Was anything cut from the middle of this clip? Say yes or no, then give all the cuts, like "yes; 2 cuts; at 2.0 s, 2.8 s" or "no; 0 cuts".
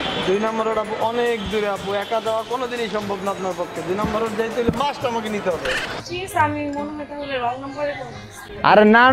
yes; 1 cut; at 6.0 s